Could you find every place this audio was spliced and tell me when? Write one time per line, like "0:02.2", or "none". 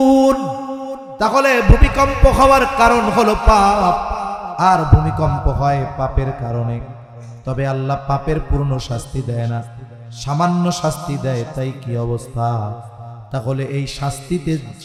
none